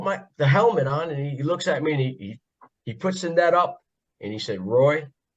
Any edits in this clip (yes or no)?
no